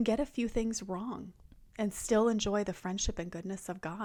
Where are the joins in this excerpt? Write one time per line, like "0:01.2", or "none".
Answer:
none

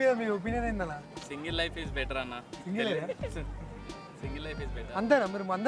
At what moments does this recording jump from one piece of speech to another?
none

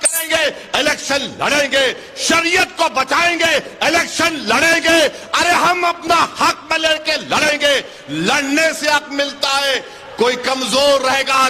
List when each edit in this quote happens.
none

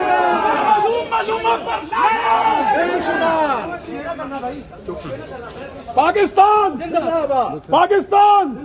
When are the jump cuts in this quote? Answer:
none

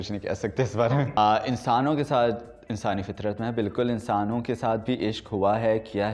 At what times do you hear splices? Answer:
0:01.2

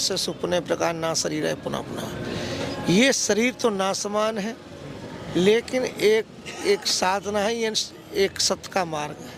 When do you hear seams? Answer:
none

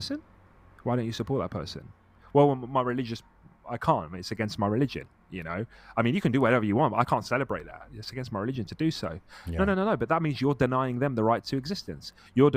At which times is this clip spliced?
none

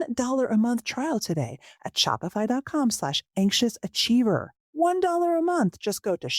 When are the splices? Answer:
0:04.6

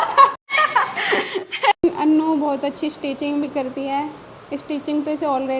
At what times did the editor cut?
0:01.8

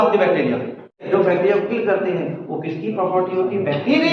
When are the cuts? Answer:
0:01.1

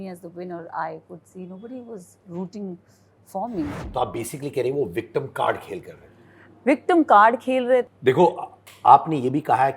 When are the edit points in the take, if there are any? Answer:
0:03.8
0:07.9

